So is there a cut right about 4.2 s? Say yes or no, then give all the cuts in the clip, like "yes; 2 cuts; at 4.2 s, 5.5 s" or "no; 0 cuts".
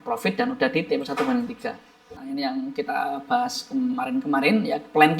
no; 1 cut; at 2.2 s